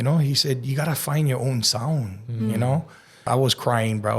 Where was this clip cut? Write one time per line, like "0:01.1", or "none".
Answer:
0:03.3